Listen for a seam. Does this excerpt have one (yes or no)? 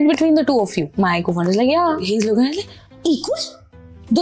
yes